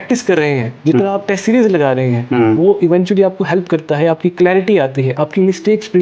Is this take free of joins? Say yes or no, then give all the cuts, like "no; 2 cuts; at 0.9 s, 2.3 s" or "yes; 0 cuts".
yes; 0 cuts